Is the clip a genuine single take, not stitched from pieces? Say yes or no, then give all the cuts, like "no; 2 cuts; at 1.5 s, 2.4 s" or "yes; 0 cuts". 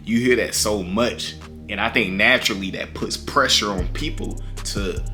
yes; 0 cuts